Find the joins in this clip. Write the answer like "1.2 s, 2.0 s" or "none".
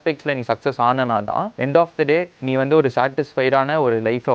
1.5 s, 2.4 s